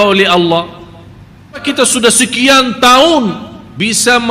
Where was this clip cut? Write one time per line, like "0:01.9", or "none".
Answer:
0:01.6